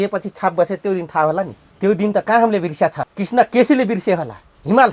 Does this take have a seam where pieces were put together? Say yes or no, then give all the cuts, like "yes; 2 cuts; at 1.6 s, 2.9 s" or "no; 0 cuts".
yes; 2 cuts; at 1.6 s, 3.1 s